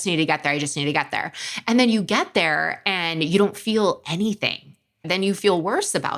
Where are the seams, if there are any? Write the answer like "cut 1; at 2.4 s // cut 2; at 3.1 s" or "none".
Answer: cut 1; at 5.0 s